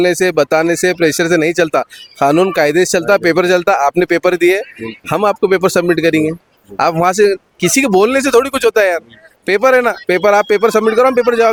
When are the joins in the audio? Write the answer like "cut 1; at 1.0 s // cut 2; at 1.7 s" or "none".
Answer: none